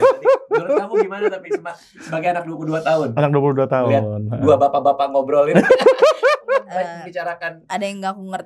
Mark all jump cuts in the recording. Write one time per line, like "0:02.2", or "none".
none